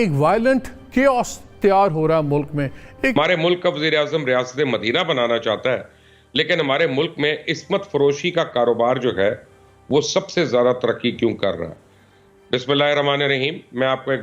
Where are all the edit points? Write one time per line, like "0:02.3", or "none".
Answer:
0:03.1